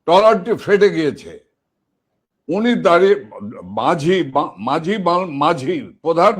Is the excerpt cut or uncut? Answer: uncut